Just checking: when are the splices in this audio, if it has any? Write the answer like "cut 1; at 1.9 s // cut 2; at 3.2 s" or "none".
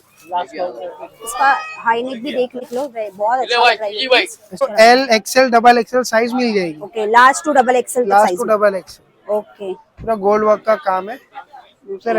cut 1; at 2.6 s // cut 2; at 4.6 s